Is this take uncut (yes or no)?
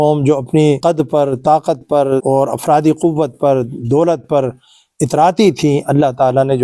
no